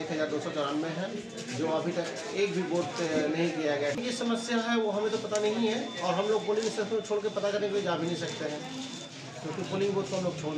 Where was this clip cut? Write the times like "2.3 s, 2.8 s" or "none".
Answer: 4.0 s

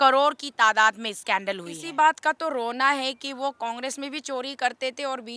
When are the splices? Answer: 1.8 s

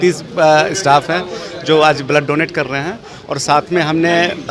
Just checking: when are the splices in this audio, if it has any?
none

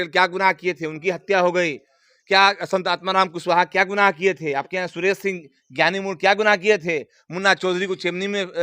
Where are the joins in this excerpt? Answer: none

